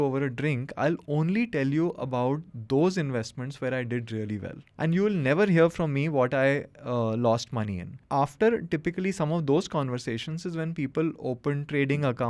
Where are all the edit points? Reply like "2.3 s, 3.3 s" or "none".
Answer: 4.6 s, 7.9 s